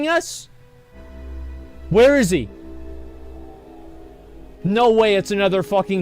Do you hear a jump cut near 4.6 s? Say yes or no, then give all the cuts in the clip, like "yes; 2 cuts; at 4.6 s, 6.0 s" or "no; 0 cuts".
yes; 2 cuts; at 1.0 s, 4.6 s